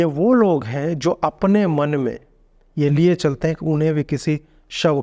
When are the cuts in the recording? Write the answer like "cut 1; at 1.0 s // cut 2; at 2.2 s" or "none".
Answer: none